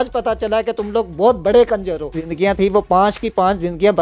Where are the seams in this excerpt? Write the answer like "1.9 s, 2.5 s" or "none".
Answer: 2.3 s